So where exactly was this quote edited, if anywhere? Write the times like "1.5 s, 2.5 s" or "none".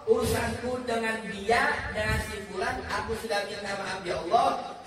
none